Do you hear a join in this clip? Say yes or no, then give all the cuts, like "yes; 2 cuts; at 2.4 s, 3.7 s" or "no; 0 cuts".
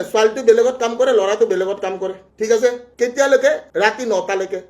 no; 0 cuts